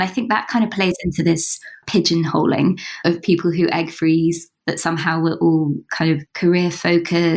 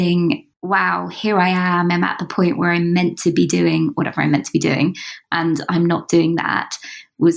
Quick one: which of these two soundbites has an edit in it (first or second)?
first